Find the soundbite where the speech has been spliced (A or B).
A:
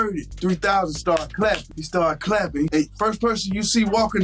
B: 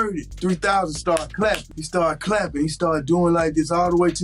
A